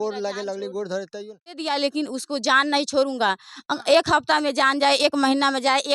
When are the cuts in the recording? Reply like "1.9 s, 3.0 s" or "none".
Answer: 1.6 s

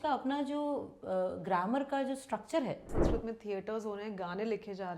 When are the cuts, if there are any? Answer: 3.0 s

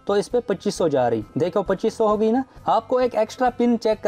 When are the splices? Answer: 2.5 s

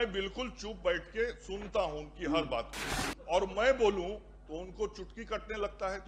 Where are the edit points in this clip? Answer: none

